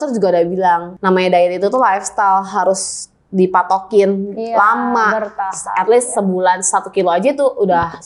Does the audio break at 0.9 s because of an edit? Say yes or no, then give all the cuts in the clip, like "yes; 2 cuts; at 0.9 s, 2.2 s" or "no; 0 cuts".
yes; 1 cut; at 0.9 s